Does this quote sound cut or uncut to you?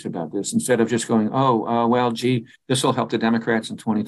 uncut